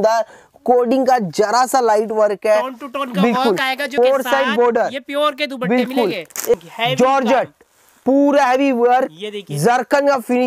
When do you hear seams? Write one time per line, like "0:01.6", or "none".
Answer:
0:03.9
0:06.5